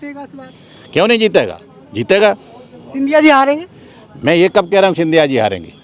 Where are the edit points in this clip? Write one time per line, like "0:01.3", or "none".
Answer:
none